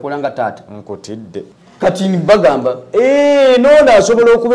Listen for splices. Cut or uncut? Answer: cut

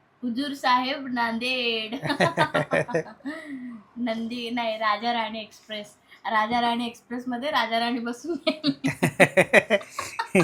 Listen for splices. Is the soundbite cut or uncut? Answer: uncut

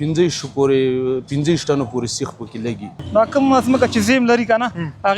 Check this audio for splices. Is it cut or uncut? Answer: cut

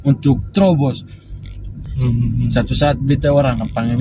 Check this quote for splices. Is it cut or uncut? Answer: cut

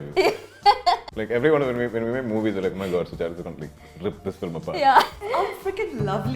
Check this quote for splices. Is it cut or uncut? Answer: cut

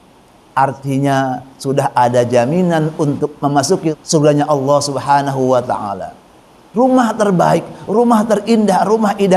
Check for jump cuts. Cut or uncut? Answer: cut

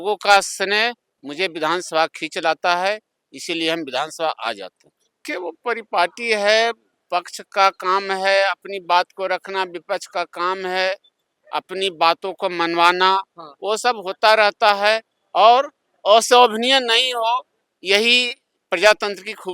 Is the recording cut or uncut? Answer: cut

